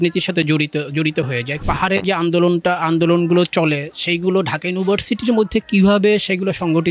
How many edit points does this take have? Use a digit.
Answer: 1